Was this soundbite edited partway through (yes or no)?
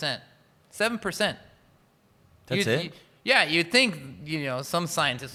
no